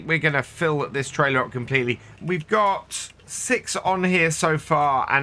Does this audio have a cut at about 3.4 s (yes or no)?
no